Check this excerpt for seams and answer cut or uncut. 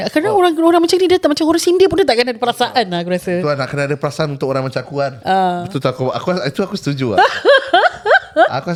uncut